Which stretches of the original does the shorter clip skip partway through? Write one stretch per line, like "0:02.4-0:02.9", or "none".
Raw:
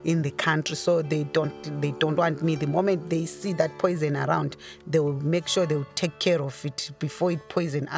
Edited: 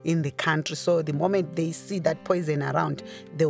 0:01.1-0:02.6

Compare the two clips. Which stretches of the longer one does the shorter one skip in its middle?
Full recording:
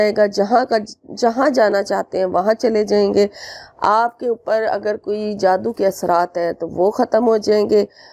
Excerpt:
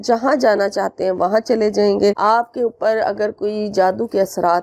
0:03.3-0:03.8

